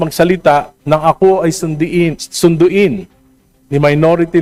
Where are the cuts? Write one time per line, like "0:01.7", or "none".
none

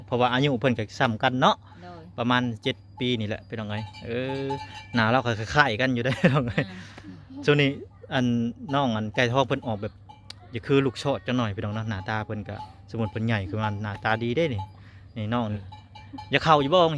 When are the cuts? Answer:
0:15.7

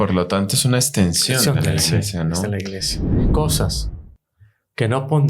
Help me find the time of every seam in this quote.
0:03.3

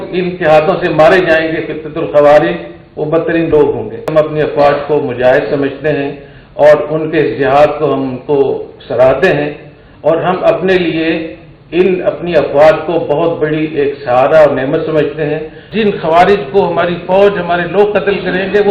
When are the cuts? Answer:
0:04.1
0:15.6

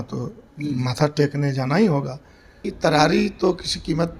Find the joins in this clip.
0:02.6

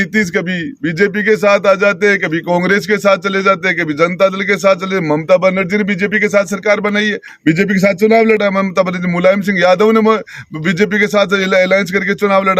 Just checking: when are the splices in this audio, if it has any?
none

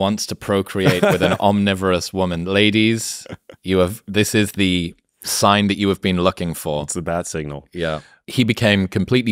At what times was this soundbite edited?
0:08.1

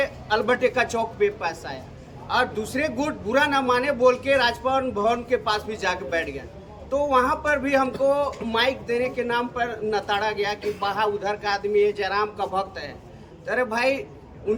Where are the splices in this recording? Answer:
none

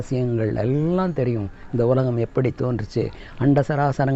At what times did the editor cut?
none

